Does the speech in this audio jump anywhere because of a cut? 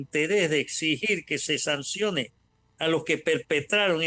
no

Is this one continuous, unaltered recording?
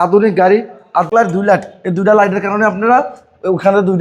no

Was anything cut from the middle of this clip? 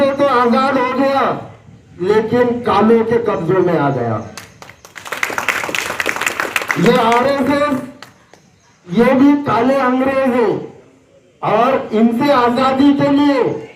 no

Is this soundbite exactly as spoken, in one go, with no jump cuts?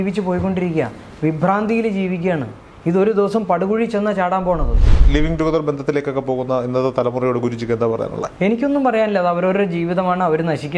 no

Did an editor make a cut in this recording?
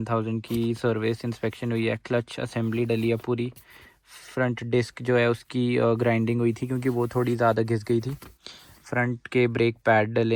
no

